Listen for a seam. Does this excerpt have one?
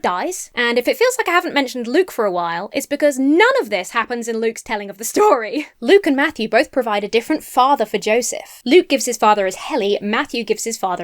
yes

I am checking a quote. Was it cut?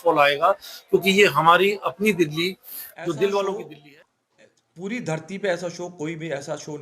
yes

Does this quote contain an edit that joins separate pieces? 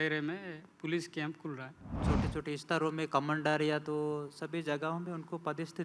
yes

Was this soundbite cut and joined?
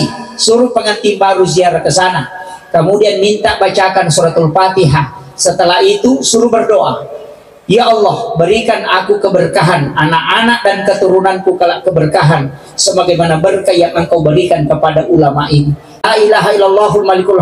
yes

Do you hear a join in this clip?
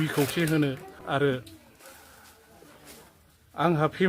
yes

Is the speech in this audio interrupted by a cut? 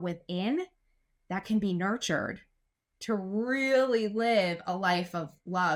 no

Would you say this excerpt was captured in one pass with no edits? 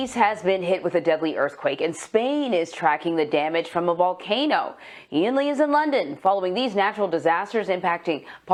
yes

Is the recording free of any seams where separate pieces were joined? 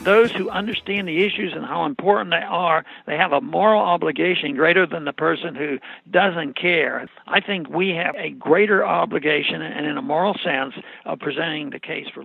no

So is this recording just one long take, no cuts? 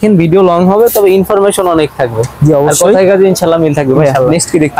yes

